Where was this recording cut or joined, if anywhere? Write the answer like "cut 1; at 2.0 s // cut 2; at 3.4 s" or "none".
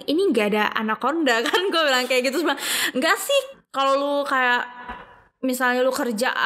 cut 1; at 3.5 s